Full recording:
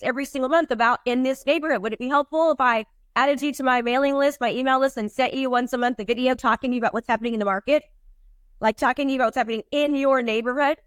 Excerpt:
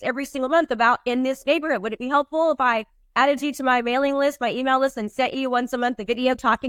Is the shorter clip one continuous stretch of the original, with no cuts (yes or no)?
yes